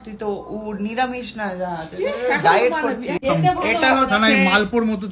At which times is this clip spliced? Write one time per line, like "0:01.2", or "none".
0:03.2